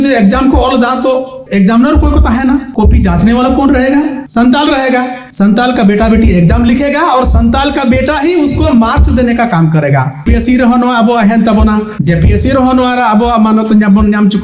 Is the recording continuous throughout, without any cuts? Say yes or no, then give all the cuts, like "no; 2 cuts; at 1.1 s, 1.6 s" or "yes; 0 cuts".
no; 6 cuts; at 1.4 s, 2.7 s, 4.2 s, 5.2 s, 10.3 s, 11.9 s